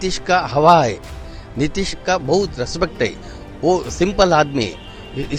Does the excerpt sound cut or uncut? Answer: uncut